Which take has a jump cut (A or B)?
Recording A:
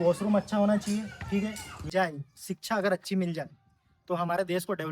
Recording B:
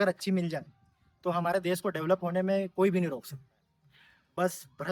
A